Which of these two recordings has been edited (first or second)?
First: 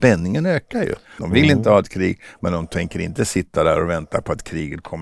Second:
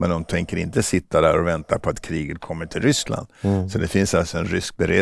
first